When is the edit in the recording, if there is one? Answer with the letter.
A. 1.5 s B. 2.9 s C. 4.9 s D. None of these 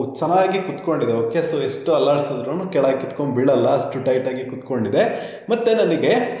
D